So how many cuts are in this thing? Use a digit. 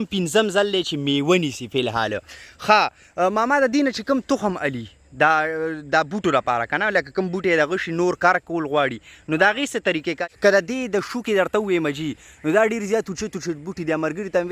1